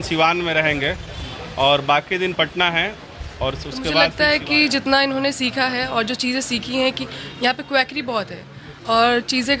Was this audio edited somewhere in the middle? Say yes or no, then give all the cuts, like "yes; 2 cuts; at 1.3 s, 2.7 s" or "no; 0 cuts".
yes; 1 cut; at 4.1 s